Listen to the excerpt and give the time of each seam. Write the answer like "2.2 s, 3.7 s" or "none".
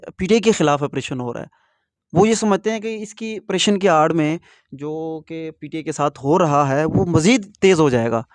none